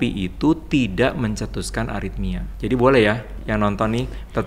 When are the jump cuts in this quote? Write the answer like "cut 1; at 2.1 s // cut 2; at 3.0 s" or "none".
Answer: cut 1; at 2.5 s // cut 2; at 3.3 s